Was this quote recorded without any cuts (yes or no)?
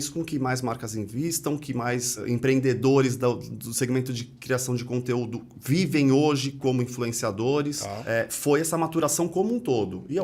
no